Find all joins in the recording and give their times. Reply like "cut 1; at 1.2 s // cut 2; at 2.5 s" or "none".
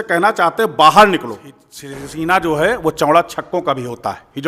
cut 1; at 2.1 s